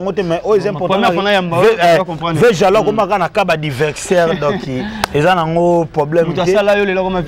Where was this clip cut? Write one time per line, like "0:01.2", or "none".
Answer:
none